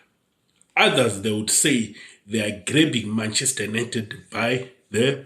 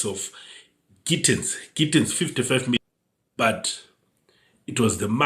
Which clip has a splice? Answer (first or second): second